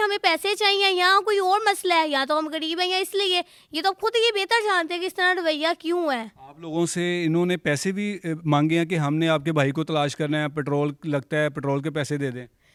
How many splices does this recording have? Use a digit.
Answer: 0